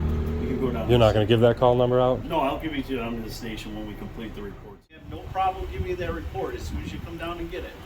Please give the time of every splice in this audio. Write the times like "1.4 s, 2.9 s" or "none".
5.0 s